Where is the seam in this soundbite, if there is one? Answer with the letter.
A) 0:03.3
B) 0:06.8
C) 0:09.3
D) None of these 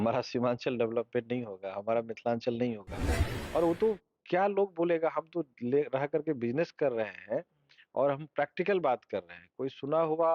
A